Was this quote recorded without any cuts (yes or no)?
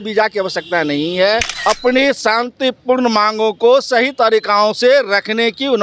no